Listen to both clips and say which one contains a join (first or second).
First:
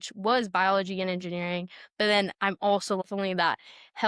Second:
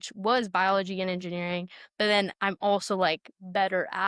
first